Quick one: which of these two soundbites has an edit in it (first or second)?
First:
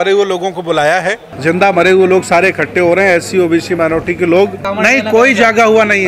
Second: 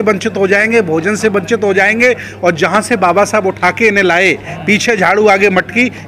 first